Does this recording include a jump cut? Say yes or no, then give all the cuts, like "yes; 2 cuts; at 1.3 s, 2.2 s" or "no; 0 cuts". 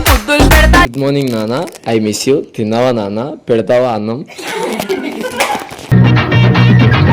yes; 1 cut; at 0.9 s